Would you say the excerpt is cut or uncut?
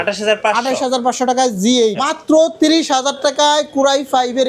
cut